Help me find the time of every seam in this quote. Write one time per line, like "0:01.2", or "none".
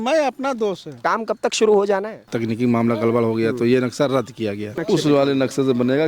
0:01.0
0:02.2
0:04.8